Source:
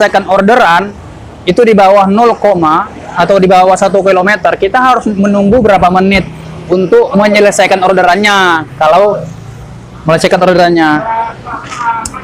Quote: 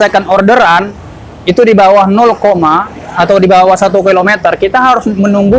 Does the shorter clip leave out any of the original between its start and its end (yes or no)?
no